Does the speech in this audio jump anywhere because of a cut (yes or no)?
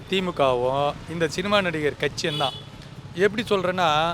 no